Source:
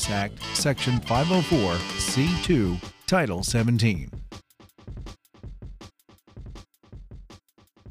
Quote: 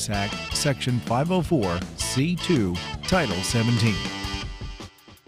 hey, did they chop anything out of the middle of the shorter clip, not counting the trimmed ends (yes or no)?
yes